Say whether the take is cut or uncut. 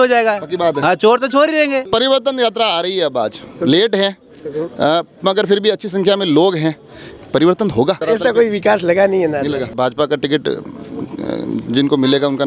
cut